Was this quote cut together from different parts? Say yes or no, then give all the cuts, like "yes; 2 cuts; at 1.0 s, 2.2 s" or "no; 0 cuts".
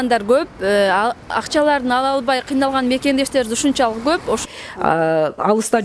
yes; 1 cut; at 4.4 s